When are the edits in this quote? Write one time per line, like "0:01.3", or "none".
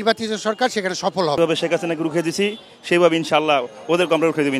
0:01.4